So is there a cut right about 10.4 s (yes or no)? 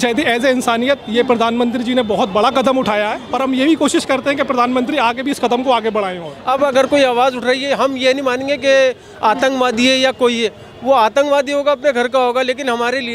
no